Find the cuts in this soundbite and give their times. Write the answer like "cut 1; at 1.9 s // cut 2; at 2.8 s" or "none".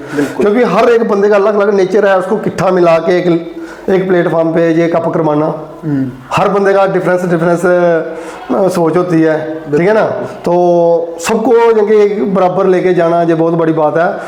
none